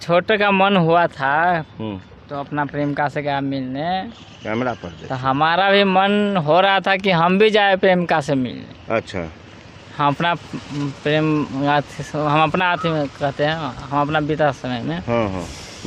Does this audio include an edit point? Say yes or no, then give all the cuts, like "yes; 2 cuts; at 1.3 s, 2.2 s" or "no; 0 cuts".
no; 0 cuts